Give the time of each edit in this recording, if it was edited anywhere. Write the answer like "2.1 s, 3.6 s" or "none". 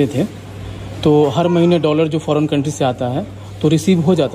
none